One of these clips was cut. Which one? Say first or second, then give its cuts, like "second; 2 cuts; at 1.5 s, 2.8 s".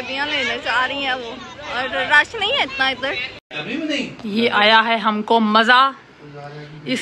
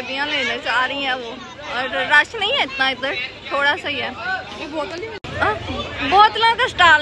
first; 1 cut; at 3.3 s